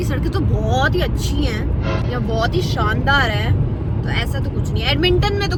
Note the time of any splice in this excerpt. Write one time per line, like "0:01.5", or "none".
none